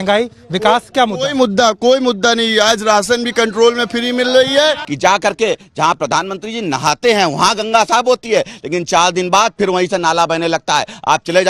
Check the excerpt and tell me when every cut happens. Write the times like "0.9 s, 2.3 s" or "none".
4.9 s